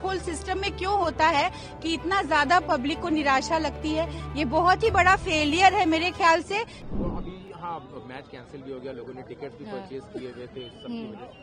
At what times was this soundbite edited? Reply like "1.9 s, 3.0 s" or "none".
6.9 s